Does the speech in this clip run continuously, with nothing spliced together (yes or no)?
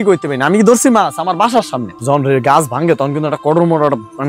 no